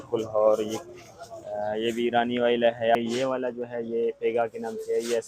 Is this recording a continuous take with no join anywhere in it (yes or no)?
no